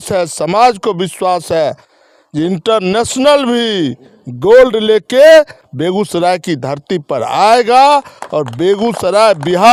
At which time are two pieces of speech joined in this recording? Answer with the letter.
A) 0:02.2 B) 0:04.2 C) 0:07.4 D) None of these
D